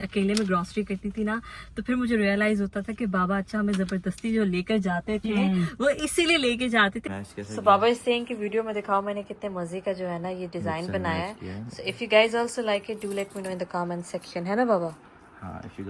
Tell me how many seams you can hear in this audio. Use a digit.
1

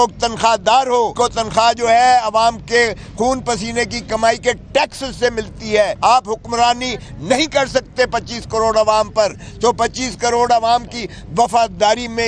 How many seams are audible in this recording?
2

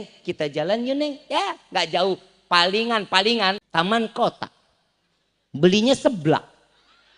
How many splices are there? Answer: 1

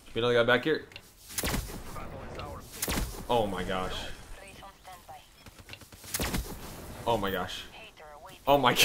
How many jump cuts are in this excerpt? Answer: 0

